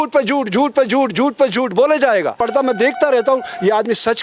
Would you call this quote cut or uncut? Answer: cut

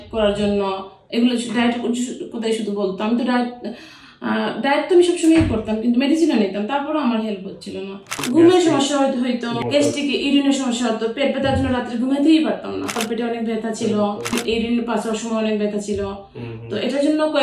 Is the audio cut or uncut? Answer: cut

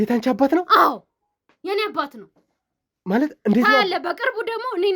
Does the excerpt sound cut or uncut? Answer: uncut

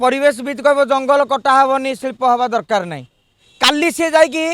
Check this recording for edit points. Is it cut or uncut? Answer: uncut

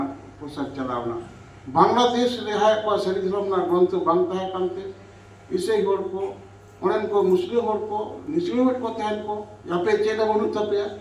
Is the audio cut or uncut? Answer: uncut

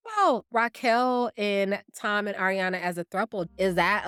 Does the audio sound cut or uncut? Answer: uncut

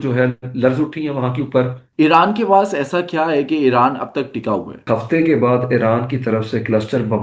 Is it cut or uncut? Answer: cut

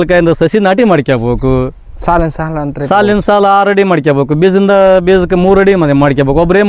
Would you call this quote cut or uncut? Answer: uncut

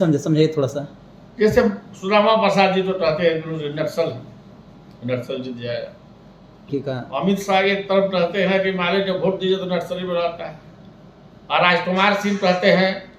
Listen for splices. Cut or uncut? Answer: cut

